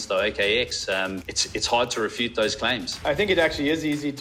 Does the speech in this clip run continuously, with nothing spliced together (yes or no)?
no